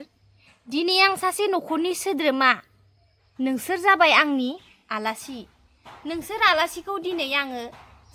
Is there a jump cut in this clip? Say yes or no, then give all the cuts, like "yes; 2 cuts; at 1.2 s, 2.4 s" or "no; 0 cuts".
no; 0 cuts